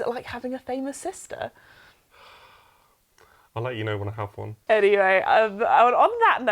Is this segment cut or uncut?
cut